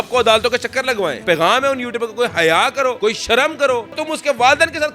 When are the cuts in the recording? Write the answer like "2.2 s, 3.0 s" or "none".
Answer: 1.2 s, 3.0 s, 4.0 s